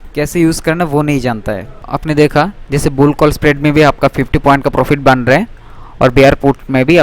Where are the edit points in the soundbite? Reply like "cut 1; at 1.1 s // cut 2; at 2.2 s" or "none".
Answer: cut 1; at 1.9 s

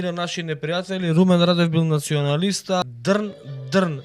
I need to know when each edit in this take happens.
cut 1; at 2.8 s

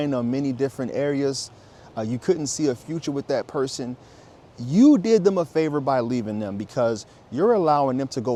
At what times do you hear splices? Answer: none

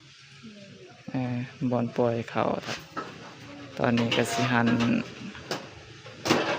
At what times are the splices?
cut 1; at 2.7 s

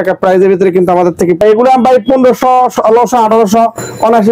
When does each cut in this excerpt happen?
cut 1; at 1.4 s

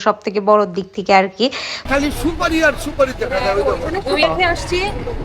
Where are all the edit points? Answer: cut 1; at 1.8 s // cut 2; at 4.2 s

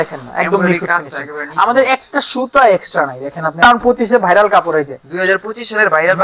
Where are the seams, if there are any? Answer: cut 1; at 3.5 s

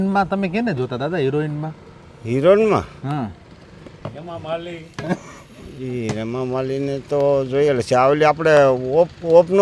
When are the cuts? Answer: none

